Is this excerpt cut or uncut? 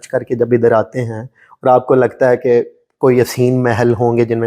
uncut